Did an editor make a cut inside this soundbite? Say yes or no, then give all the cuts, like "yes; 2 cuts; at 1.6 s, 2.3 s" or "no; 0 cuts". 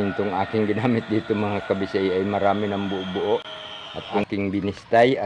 yes; 1 cut; at 4.1 s